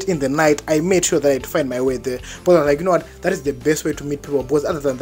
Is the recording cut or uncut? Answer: uncut